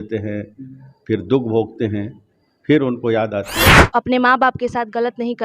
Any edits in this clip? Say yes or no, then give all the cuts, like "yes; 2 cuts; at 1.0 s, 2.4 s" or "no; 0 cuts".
yes; 1 cut; at 3.8 s